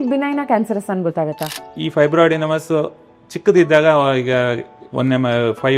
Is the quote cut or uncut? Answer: cut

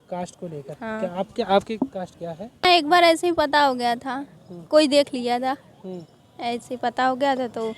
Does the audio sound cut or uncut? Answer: cut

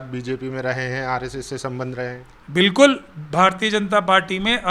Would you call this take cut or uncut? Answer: uncut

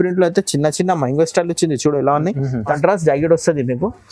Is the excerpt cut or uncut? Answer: cut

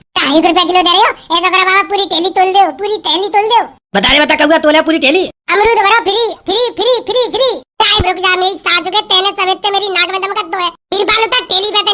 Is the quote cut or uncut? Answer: cut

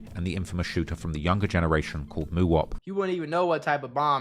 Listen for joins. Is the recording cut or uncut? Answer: cut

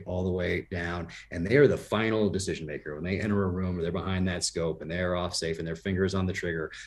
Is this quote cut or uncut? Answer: uncut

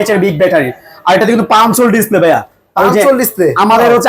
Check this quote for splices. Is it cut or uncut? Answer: uncut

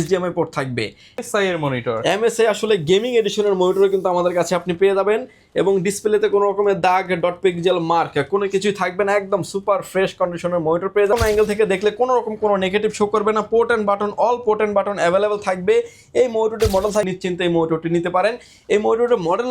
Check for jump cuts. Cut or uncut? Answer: cut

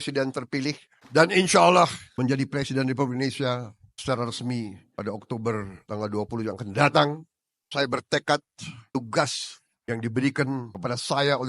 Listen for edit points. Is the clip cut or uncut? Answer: cut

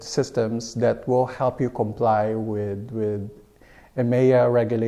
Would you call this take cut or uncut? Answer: uncut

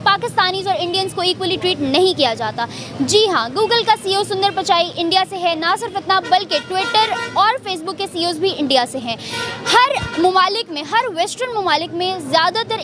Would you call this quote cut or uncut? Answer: uncut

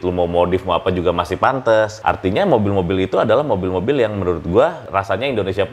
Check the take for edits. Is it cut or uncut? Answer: cut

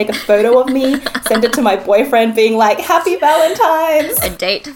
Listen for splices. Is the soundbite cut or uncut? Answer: uncut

